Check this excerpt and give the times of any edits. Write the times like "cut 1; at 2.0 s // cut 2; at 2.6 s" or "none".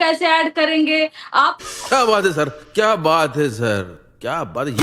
cut 1; at 1.6 s